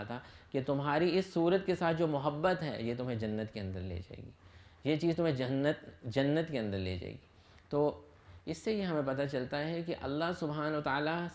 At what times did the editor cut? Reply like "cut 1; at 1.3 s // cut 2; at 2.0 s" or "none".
none